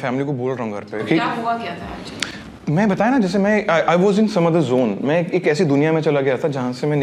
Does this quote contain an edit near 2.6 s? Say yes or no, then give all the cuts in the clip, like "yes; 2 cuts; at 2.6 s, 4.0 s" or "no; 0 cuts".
yes; 1 cut; at 2.6 s